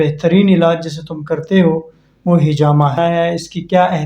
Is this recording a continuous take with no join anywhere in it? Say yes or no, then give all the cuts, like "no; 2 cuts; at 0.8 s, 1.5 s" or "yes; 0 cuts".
no; 1 cut; at 3.0 s